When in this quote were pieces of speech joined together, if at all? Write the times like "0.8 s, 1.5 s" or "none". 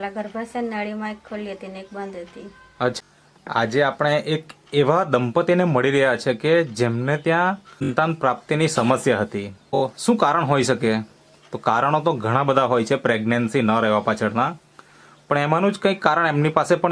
3.0 s, 7.9 s, 9.8 s